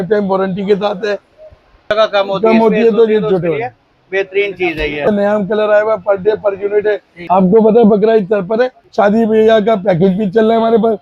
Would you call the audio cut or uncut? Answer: cut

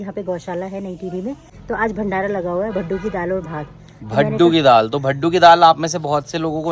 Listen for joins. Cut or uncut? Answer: cut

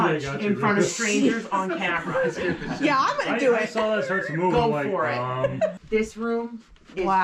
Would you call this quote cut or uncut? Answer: cut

